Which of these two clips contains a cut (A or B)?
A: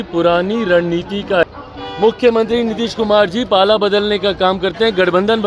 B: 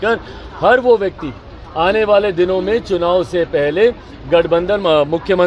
A